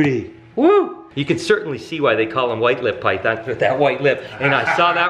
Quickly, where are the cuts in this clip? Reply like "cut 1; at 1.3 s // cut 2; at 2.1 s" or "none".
cut 1; at 1.1 s